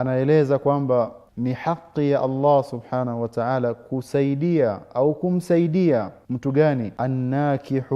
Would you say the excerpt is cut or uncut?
cut